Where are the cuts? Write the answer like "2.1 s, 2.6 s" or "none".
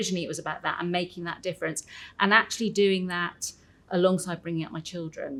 none